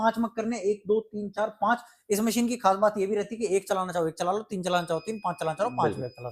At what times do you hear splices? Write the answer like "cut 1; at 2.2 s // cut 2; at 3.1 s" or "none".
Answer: none